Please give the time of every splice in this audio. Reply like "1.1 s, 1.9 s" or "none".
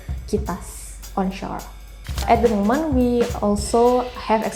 2.2 s